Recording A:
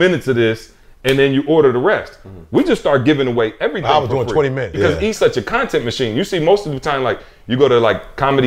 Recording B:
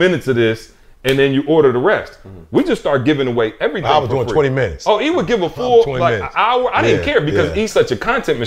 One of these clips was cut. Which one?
A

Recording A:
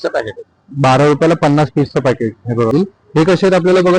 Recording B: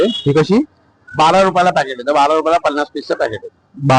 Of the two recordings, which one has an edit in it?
A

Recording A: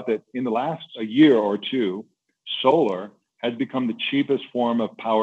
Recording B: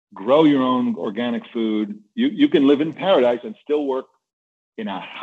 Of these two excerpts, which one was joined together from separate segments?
A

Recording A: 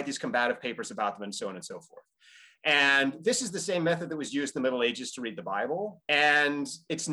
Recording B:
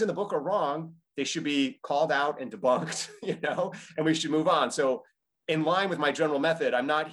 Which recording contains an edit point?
A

